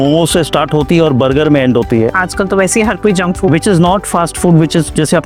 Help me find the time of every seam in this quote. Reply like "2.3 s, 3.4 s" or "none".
none